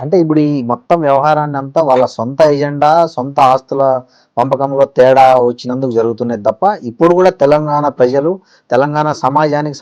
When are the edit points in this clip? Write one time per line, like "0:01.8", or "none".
none